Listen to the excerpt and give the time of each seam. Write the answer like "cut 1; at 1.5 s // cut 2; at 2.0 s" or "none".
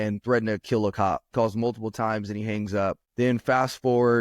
cut 1; at 1.3 s